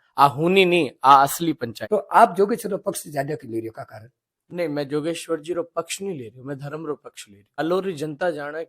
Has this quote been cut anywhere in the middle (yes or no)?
yes